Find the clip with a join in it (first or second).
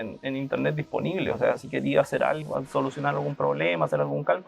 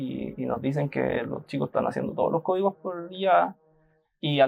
first